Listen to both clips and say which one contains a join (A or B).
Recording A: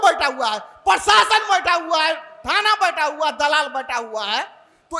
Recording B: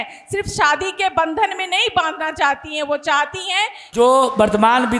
B